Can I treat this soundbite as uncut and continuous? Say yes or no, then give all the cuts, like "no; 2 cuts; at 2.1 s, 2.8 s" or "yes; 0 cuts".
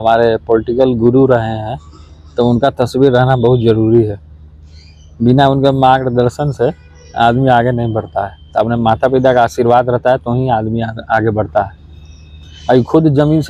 yes; 0 cuts